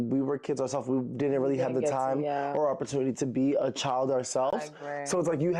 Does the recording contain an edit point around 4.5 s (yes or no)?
no